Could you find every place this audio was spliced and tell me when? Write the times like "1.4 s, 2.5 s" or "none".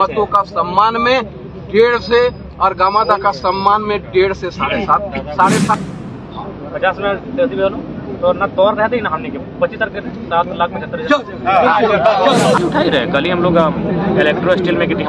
5.7 s, 12.6 s